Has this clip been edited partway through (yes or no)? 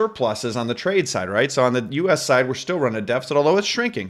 no